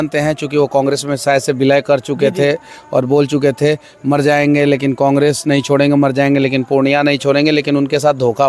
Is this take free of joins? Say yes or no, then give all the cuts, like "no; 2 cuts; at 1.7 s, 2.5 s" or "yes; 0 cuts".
yes; 0 cuts